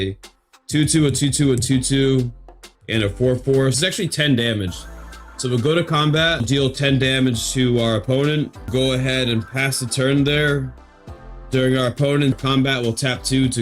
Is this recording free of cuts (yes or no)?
no